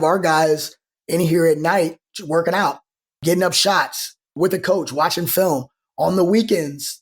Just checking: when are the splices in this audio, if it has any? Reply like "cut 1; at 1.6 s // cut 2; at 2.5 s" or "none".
cut 1; at 3.2 s // cut 2; at 4.4 s